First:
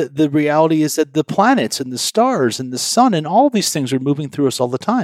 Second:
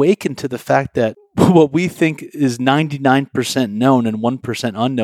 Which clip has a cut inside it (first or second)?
second